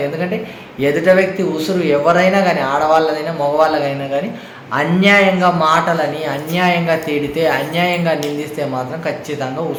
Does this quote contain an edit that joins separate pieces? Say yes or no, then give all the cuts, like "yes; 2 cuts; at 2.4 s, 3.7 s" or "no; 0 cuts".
no; 0 cuts